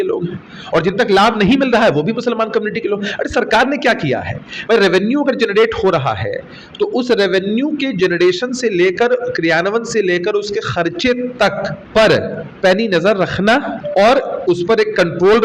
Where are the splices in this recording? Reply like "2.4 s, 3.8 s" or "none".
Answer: 11.8 s, 12.4 s, 13.8 s